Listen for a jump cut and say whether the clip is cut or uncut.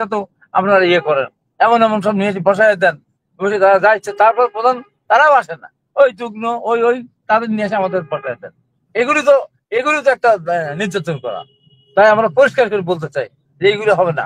uncut